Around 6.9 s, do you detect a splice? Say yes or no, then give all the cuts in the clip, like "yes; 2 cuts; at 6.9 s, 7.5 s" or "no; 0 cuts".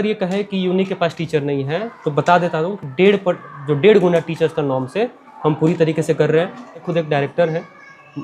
yes; 1 cut; at 6.9 s